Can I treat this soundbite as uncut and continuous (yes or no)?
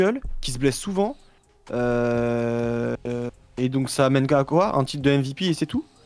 yes